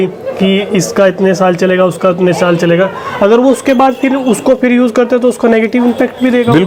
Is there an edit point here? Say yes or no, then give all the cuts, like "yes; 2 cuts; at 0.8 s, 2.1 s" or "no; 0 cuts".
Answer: no; 0 cuts